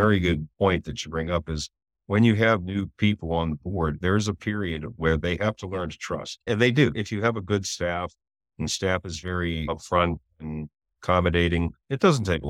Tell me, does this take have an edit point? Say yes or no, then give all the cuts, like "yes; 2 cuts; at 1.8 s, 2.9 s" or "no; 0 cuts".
yes; 2 cuts; at 4.0 s, 7.0 s